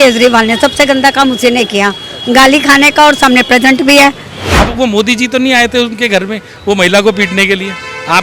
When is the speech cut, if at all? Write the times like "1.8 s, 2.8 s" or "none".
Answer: 4.6 s